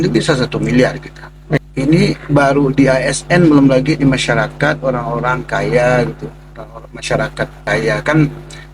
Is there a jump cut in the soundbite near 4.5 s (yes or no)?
no